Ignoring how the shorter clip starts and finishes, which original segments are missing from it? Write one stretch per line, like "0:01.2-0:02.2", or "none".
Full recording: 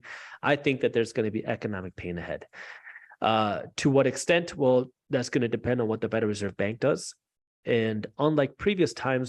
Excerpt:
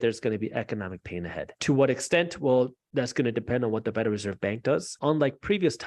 0:02.5-0:03.7
0:07.1-0:08.1